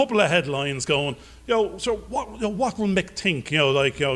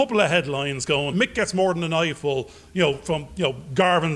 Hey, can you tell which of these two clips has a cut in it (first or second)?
second